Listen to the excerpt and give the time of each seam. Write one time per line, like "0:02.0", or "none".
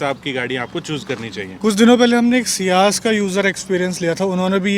none